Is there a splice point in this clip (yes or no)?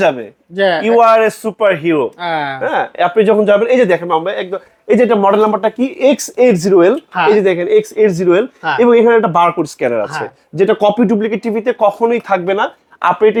no